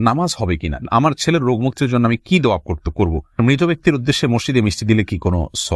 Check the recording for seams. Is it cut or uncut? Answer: cut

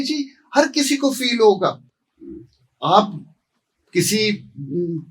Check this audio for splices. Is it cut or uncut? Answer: uncut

